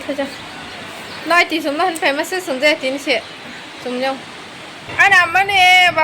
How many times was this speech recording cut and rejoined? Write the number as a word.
one